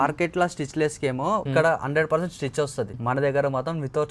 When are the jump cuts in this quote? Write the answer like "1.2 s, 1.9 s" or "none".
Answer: 1.5 s, 3.0 s